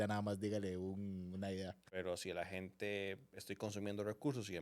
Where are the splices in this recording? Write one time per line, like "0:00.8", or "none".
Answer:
0:01.9